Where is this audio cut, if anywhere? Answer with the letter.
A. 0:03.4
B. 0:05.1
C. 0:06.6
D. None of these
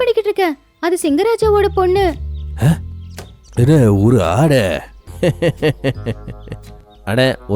B